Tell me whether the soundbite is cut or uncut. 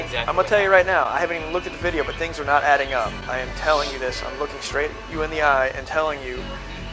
uncut